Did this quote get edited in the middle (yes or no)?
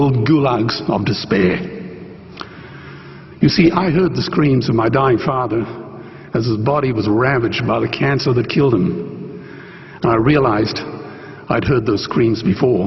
no